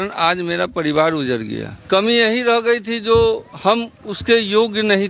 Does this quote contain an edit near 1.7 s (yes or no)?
yes